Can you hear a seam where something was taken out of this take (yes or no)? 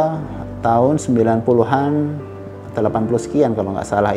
no